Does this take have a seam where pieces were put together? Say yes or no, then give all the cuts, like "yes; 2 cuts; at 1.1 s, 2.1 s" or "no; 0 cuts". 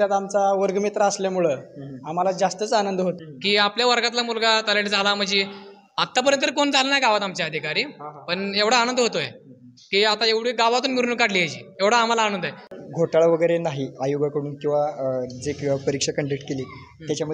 yes; 2 cuts; at 3.3 s, 12.7 s